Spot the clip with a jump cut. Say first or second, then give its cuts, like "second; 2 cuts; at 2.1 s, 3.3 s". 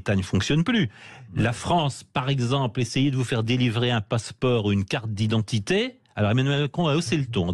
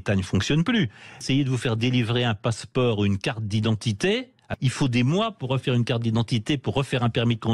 second; 2 cuts; at 1.2 s, 4.5 s